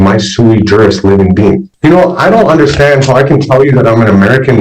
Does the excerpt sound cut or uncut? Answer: cut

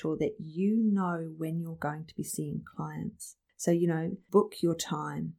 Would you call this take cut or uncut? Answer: uncut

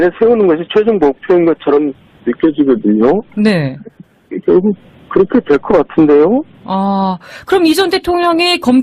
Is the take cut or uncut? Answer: cut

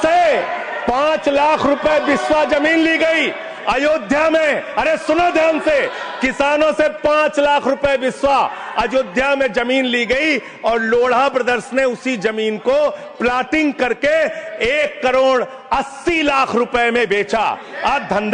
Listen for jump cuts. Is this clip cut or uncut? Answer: uncut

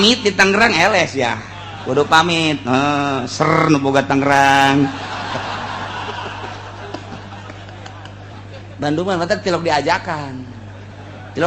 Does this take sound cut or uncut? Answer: cut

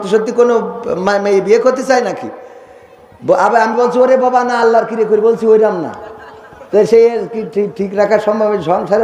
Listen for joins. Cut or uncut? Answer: uncut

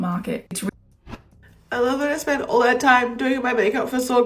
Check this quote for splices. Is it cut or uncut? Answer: cut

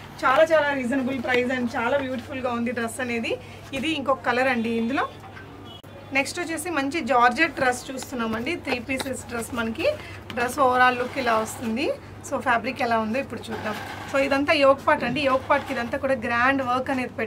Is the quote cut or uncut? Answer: uncut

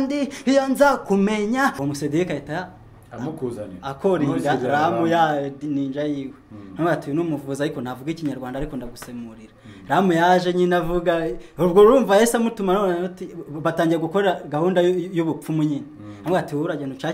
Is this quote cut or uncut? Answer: cut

